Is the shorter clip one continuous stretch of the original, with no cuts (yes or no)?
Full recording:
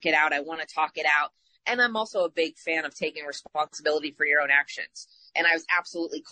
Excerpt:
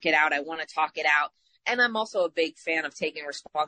yes